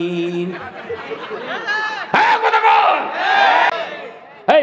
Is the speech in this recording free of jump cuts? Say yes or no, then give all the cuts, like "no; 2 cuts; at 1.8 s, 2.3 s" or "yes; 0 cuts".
no; 1 cut; at 3.7 s